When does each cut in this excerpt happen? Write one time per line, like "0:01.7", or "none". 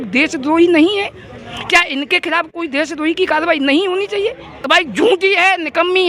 0:04.6

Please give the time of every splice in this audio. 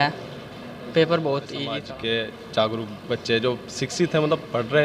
0:01.7

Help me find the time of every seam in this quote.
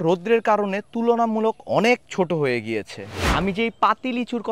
none

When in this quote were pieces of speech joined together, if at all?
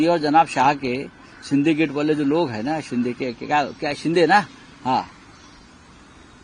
none

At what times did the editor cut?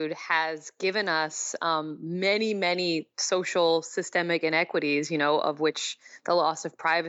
none

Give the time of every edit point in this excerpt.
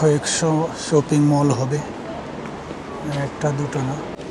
none

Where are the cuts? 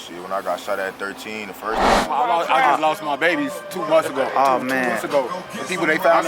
0:02.1

